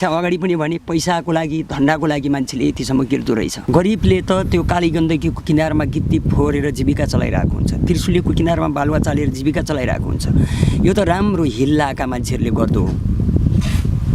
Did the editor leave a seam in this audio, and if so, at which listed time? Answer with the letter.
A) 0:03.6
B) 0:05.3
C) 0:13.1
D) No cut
A